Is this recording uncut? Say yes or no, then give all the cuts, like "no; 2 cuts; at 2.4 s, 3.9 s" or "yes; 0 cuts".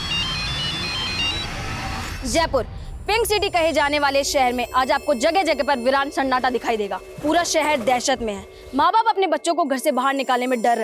no; 2 cuts; at 2.1 s, 7.0 s